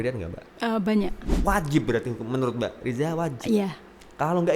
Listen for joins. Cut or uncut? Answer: cut